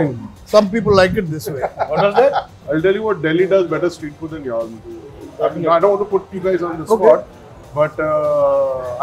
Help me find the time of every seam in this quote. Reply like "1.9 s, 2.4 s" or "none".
2.5 s